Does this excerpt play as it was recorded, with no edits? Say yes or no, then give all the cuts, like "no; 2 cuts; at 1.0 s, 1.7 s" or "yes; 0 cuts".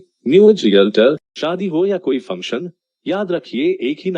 no; 1 cut; at 1.3 s